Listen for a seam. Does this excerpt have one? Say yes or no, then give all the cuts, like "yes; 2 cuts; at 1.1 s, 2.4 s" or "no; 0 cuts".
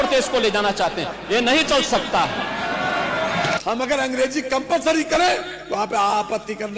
yes; 1 cut; at 3.6 s